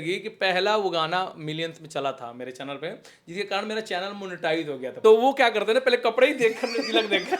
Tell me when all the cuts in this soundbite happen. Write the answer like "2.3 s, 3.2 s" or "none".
4.9 s